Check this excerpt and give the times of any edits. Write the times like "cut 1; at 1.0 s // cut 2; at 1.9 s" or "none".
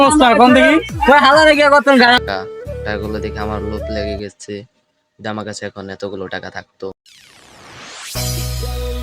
cut 1; at 2.2 s